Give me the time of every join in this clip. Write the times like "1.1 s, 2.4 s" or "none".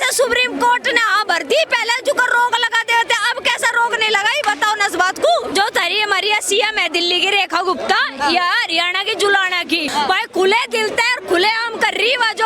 5.5 s, 9.9 s